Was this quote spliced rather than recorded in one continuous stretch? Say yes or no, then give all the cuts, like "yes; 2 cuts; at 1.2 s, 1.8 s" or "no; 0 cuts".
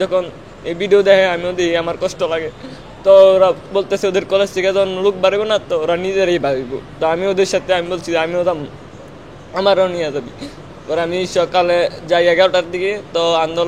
no; 0 cuts